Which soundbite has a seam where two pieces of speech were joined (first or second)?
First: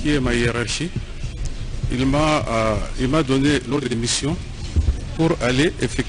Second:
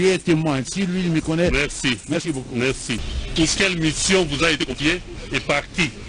second